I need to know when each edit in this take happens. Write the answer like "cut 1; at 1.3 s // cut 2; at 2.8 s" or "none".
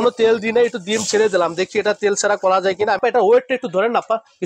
cut 1; at 3.0 s